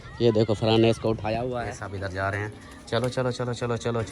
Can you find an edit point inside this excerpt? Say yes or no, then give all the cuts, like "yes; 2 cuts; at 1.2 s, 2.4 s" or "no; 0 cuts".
yes; 1 cut; at 1.7 s